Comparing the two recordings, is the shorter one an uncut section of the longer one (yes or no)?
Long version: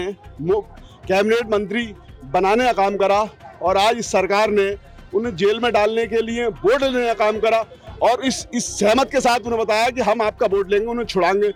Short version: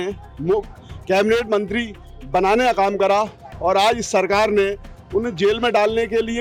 yes